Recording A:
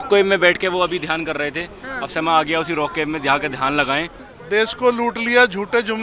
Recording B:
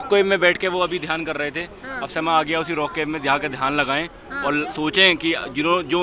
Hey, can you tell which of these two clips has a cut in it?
A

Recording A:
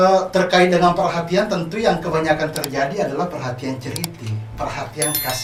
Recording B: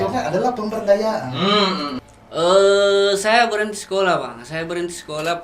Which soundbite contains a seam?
B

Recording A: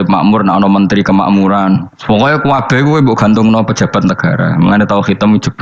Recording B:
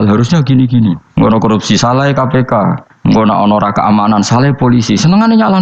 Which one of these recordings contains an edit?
B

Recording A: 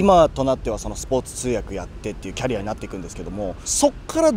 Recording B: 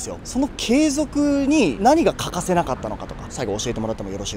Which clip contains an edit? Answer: B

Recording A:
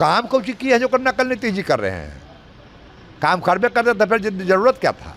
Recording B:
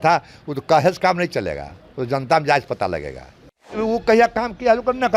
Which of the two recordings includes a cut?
B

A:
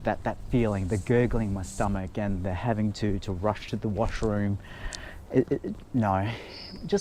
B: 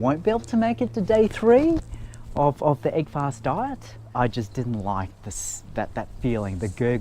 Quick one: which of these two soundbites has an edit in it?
B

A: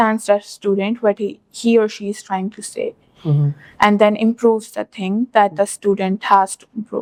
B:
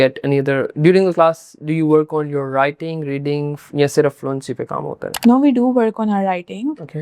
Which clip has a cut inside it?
B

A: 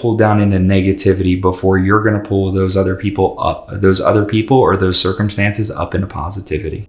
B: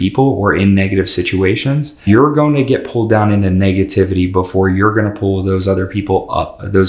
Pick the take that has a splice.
B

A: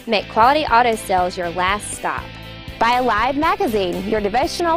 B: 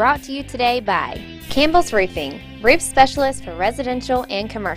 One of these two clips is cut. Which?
B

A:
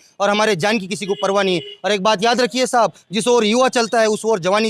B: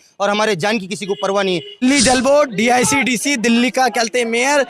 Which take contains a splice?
B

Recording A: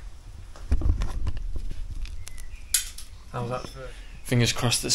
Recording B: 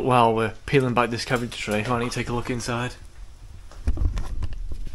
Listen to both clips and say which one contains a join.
A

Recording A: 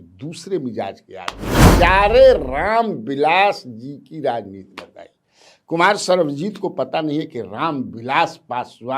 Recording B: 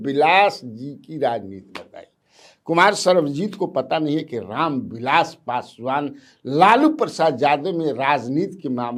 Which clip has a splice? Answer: A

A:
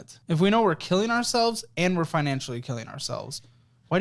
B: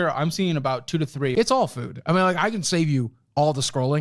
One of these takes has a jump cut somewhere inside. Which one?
B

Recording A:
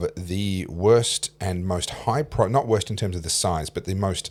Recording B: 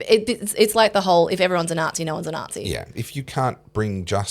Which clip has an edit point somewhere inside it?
B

